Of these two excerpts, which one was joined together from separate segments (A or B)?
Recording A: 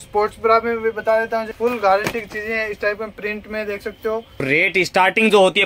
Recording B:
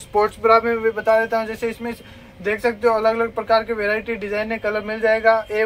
A